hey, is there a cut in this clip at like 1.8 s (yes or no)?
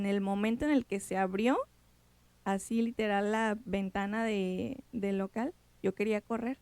no